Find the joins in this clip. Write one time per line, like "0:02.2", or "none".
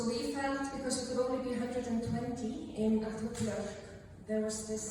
none